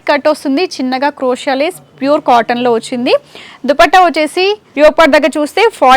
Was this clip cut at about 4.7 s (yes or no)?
yes